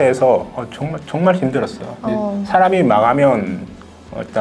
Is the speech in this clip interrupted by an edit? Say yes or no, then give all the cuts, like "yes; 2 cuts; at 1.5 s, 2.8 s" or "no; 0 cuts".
no; 0 cuts